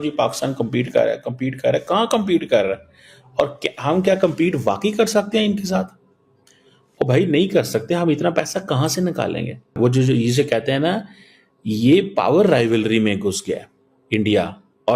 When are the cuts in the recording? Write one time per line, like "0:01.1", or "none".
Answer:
none